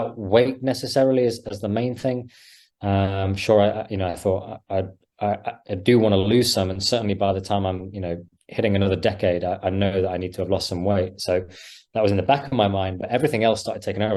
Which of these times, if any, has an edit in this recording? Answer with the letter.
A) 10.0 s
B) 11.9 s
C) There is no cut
C